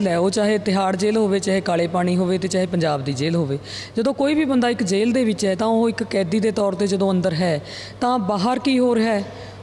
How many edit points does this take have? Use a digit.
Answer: 0